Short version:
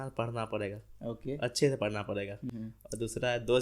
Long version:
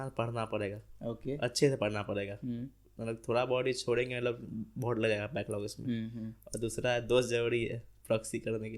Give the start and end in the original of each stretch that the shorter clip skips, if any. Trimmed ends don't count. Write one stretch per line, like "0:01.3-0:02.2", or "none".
0:02.5-0:06.1